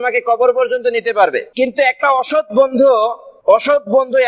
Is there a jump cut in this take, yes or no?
yes